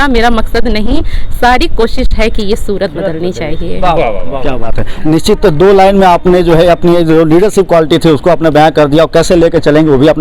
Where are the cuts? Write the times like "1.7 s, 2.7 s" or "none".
none